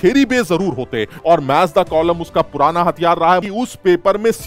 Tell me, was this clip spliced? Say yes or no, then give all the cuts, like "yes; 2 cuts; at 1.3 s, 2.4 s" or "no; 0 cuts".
yes; 2 cuts; at 1.1 s, 3.5 s